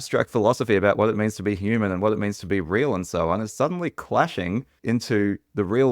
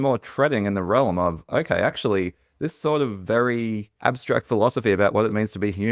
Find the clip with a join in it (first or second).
first